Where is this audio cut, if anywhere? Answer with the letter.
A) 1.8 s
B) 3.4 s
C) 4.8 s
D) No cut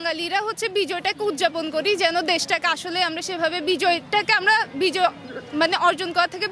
D